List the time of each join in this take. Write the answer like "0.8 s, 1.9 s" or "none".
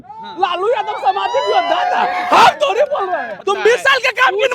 3.3 s